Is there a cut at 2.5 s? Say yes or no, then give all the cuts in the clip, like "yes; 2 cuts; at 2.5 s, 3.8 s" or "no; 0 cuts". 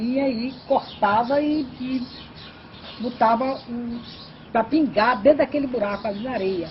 no; 0 cuts